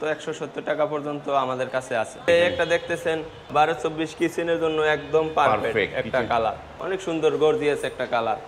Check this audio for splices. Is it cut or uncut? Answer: cut